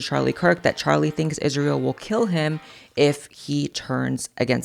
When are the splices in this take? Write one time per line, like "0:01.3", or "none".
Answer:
none